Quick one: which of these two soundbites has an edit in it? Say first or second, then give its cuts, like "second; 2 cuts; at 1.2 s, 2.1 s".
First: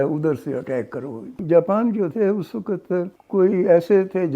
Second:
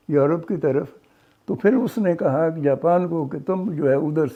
first; 2 cuts; at 1.4 s, 3.2 s